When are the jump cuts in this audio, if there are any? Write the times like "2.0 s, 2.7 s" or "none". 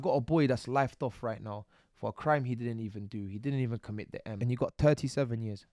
4.4 s